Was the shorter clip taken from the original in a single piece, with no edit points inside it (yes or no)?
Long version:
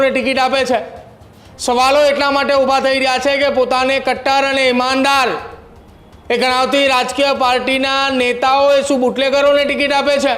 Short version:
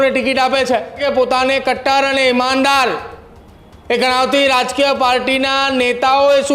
no